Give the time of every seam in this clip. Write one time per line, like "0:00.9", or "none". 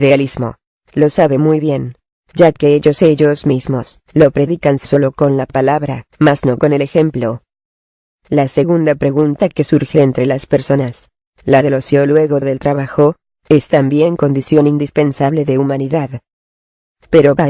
0:06.4